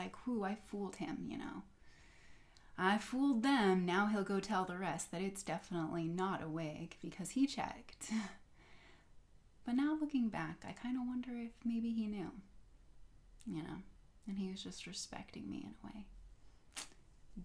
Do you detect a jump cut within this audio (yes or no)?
no